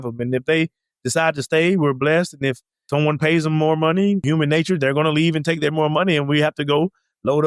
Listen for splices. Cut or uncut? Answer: cut